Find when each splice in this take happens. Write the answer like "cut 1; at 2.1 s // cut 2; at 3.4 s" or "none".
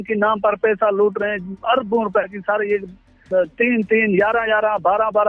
cut 1; at 3.2 s